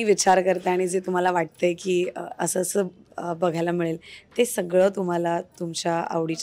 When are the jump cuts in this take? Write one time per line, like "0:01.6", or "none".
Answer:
none

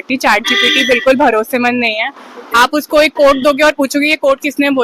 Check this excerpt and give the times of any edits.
none

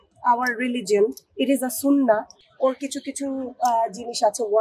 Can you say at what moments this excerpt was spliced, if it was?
0:02.4

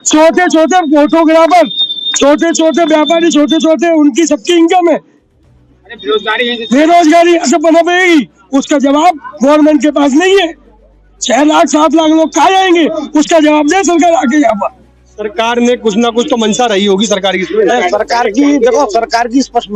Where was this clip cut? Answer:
none

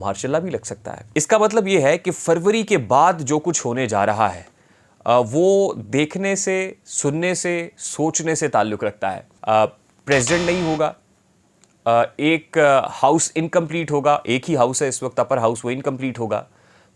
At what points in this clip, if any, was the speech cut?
0:00.9
0:09.3

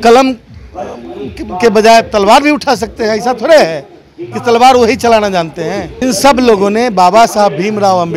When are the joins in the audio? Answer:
0:05.9

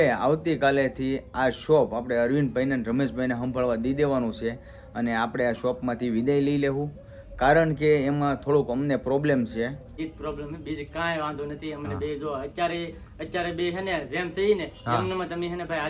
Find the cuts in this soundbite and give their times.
0:09.9

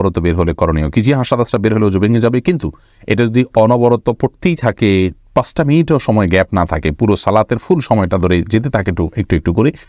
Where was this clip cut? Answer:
none

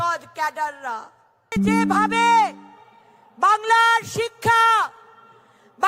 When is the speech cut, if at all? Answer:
0:01.4

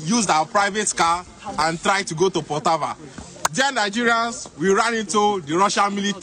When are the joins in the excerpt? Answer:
none

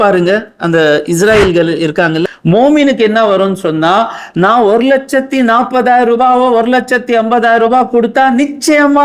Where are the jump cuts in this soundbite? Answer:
0:02.2

